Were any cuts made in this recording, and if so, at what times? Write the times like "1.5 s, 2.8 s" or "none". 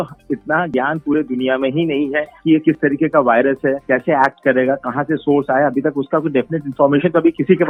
none